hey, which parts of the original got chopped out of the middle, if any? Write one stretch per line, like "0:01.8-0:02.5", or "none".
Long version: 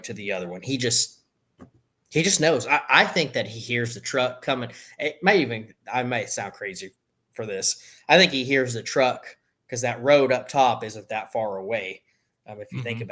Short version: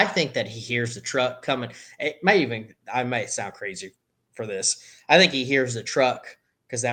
none